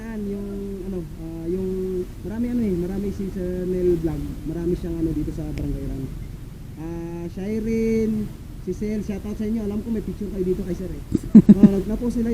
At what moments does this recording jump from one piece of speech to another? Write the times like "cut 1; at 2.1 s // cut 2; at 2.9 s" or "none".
none